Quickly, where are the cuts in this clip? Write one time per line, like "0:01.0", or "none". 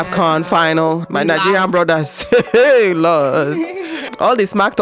0:01.0